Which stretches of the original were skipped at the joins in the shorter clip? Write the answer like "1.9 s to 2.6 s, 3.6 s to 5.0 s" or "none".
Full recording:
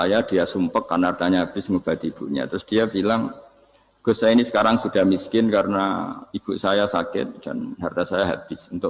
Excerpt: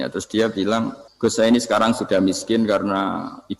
3.4 s to 3.9 s